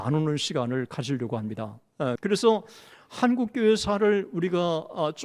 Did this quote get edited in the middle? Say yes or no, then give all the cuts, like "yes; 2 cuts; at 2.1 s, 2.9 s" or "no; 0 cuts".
yes; 1 cut; at 2.2 s